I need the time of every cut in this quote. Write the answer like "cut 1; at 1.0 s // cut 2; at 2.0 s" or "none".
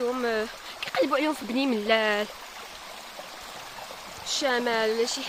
none